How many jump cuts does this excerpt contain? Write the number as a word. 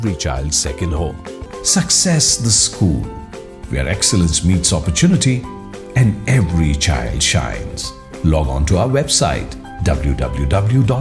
one